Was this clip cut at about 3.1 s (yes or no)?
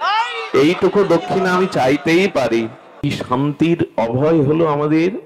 yes